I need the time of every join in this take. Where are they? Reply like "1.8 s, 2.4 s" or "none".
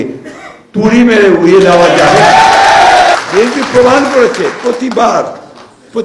3.1 s